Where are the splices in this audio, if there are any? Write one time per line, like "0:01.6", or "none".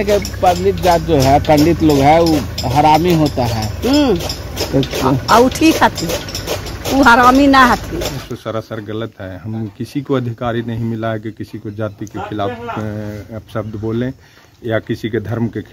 0:08.3